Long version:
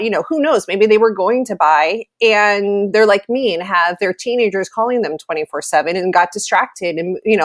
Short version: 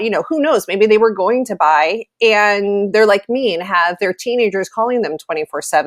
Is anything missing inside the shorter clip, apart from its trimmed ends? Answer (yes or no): no